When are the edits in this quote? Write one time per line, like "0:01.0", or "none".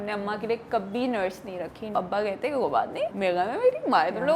0:01.9
0:03.1